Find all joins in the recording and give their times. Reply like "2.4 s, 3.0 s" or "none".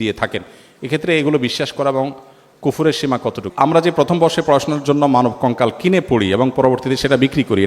3.4 s